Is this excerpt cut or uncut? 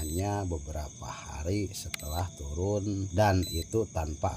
cut